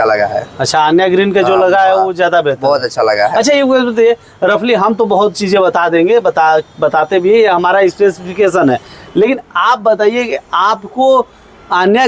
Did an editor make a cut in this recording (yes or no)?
no